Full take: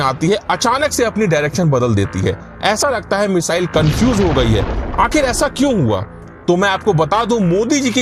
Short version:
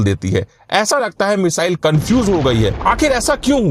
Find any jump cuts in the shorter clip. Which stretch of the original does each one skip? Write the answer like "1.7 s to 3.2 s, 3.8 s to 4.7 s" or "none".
4.7 s to 4.9 s

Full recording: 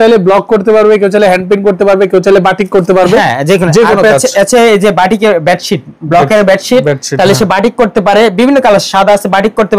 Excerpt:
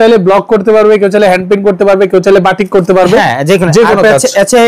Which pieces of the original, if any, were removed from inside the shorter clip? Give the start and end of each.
none

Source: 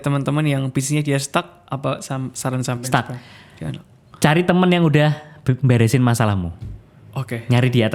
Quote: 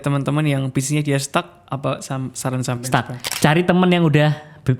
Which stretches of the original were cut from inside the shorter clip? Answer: 3.2 s to 4.0 s

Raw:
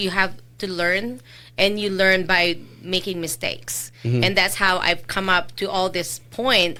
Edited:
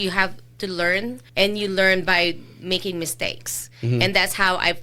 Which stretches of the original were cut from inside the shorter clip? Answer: 1.2 s to 1.4 s

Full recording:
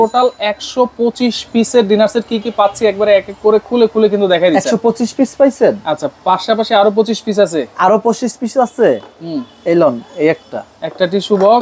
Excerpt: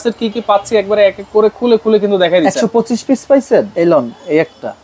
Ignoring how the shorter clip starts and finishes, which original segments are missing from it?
5.8 s to 9.6 s

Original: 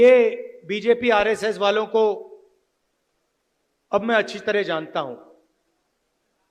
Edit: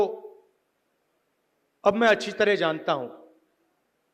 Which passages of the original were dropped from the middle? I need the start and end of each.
none

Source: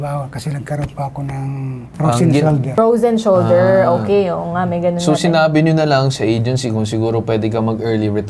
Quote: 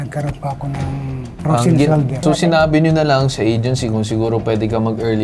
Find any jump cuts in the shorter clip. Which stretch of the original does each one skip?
2.7 s to 5.0 s

